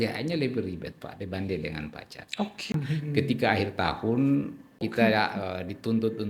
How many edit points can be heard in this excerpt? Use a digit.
2